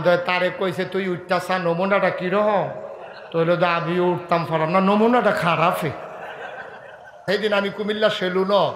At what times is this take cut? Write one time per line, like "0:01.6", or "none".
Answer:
0:07.3